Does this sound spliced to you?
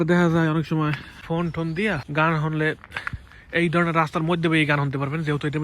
yes; 2 cuts; at 1.1 s, 2.0 s

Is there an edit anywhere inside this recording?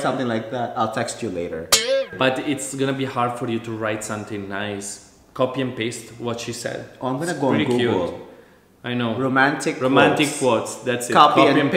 yes; 1 cut; at 2.1 s

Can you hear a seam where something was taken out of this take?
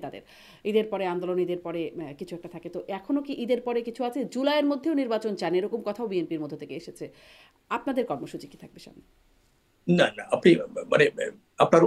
no; 0 cuts

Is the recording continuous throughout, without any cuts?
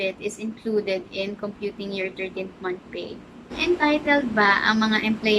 no; 1 cut; at 3.5 s

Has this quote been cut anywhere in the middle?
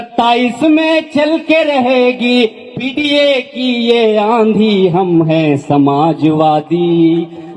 no; 0 cuts

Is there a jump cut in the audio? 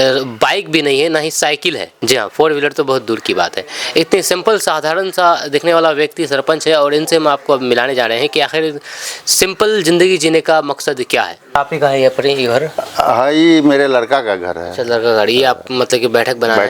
yes; 2 cuts; at 1.9 s, 11.6 s

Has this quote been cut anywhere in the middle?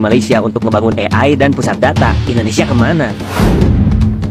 no; 0 cuts

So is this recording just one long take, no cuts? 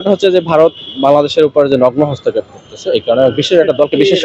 yes; 0 cuts

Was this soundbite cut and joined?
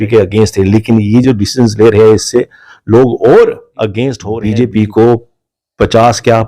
yes; 1 cut; at 4.3 s

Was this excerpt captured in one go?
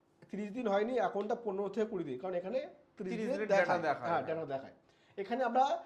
yes; 0 cuts

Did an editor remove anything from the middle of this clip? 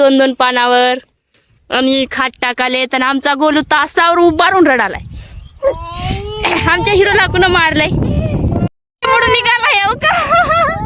no; 0 cuts

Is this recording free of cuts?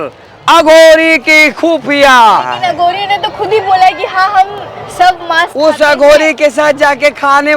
no; 1 cut; at 2.6 s

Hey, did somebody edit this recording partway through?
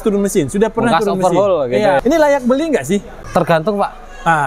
yes; 2 cuts; at 2.0 s, 3.2 s

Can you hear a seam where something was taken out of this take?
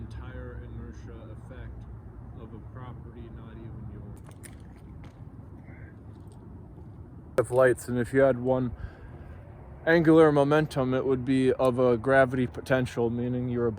yes; 2 cuts; at 4.2 s, 7.4 s

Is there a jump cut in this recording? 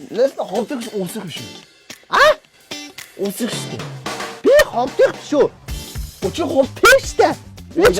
yes; 1 cut; at 6.7 s

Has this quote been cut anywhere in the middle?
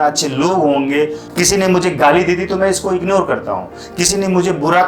yes; 1 cut; at 1.2 s

